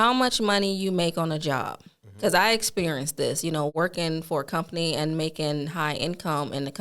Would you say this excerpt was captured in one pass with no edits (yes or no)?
no